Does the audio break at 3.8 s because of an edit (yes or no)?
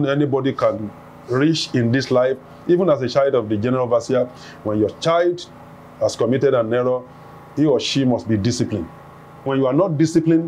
no